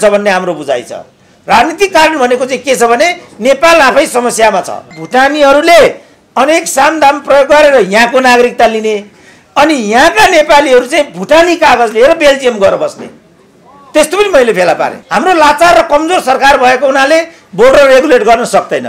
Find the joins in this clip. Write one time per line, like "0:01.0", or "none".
0:05.0
0:15.0

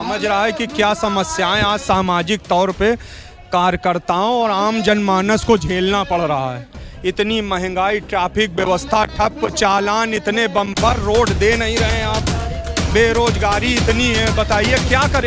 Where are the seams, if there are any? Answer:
none

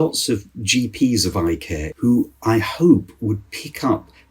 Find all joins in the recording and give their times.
0:01.8

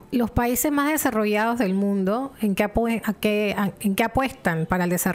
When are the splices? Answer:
none

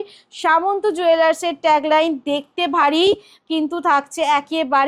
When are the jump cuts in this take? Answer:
none

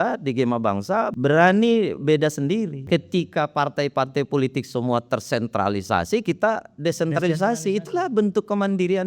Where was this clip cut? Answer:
0:01.1
0:02.8

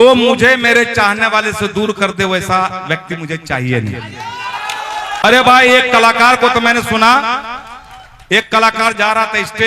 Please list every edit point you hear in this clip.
0:05.2

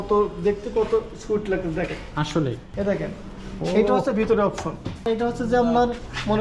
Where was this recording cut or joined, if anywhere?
0:02.7
0:05.1

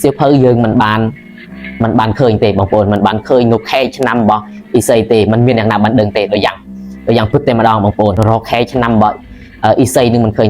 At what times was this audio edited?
0:08.2

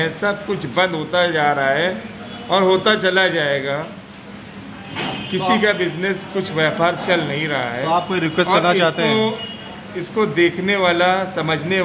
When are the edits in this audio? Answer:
none

